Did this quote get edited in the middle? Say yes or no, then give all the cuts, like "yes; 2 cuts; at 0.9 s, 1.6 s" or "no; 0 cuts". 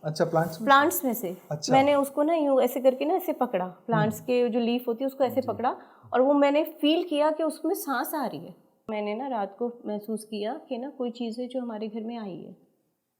yes; 1 cut; at 8.9 s